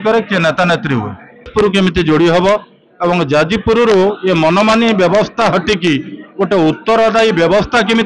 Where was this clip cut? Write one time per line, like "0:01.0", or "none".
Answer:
0:01.5